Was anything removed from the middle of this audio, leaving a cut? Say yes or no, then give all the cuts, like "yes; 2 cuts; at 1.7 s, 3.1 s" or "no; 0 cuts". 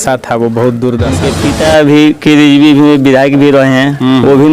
yes; 1 cut; at 1.2 s